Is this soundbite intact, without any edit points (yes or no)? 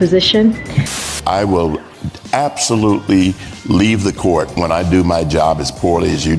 no